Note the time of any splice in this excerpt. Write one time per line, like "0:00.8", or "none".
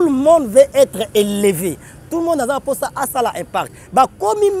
0:01.5